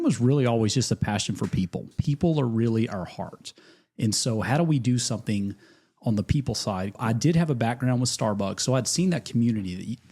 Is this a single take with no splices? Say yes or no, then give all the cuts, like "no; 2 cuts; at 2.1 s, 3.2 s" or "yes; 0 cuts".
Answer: no; 2 cuts; at 1.9 s, 6.9 s